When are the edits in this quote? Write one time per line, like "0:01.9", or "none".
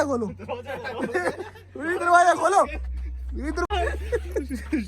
0:03.7